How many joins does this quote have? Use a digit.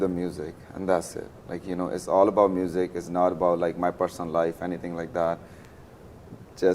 0